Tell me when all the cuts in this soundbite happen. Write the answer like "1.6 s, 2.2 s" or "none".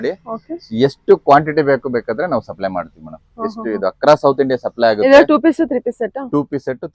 none

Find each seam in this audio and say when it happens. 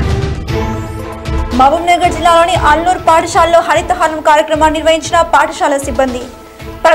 1.1 s

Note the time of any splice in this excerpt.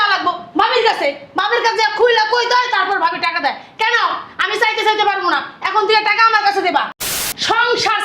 7.0 s

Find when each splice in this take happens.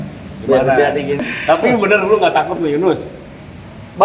1.2 s

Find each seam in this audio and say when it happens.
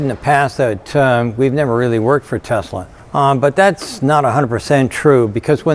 none

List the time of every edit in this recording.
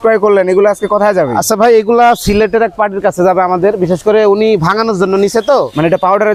none

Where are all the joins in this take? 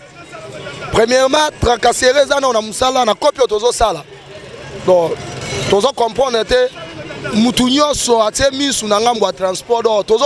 none

